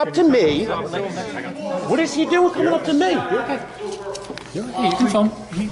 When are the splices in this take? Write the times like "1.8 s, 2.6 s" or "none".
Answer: none